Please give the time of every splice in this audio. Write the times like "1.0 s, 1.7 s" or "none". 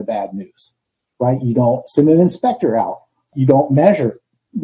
3.3 s